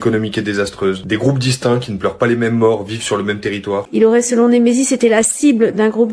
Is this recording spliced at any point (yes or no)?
yes